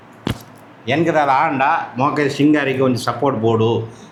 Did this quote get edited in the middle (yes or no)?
no